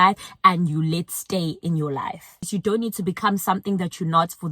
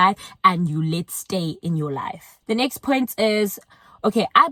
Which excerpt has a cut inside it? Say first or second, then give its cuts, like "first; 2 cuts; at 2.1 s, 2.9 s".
first; 1 cut; at 2.4 s